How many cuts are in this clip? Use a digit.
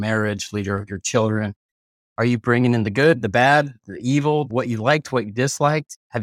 1